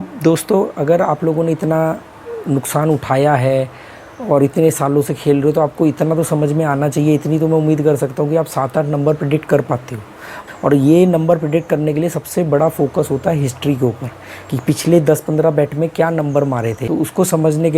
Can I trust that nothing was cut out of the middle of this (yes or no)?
no